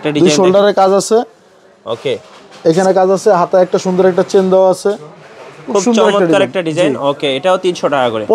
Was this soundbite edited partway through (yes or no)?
no